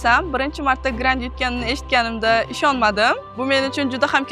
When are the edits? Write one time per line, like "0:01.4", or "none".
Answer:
0:03.3